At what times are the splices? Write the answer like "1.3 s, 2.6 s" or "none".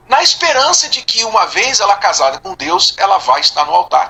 none